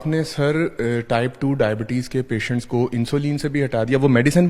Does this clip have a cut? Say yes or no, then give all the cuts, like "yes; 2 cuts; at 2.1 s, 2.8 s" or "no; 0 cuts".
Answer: no; 0 cuts